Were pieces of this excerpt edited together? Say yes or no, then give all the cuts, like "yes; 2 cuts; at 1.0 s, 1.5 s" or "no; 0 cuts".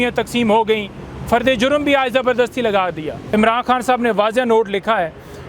yes; 1 cut; at 3.2 s